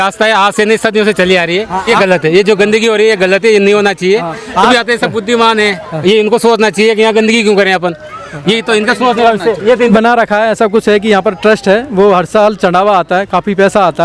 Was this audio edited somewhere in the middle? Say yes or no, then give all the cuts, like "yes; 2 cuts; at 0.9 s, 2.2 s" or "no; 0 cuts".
yes; 3 cuts; at 1.9 s, 4.7 s, 9.9 s